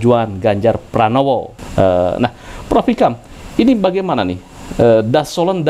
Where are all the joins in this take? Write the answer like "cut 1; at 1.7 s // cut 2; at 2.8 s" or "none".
none